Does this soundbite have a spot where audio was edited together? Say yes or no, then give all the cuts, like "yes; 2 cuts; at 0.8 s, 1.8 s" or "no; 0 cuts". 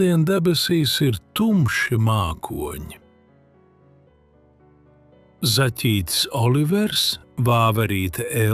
no; 0 cuts